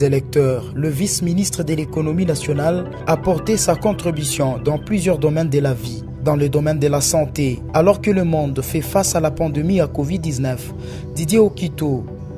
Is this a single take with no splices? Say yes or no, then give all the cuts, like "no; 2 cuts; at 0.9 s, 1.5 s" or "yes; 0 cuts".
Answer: yes; 0 cuts